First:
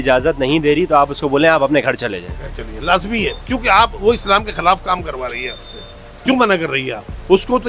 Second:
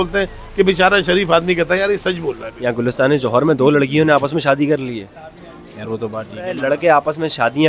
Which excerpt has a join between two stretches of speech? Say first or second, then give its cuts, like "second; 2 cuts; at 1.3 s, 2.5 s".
second; 2 cuts; at 2.5 s, 6.5 s